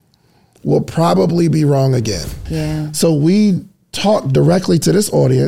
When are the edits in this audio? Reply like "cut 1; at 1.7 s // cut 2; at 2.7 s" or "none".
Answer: cut 1; at 2.4 s